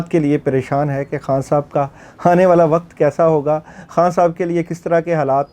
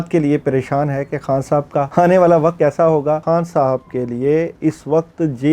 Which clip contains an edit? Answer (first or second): second